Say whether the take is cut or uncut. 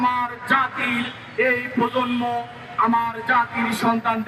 uncut